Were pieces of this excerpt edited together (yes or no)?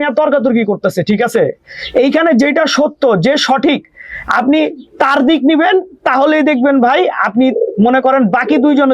no